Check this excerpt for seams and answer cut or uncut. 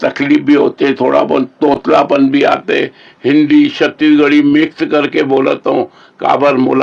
uncut